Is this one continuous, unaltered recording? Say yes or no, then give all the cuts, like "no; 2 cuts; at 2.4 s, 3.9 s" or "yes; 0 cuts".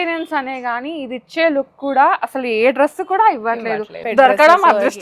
no; 1 cut; at 4.0 s